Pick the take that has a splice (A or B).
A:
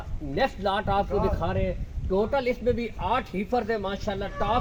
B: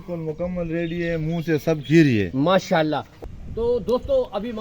B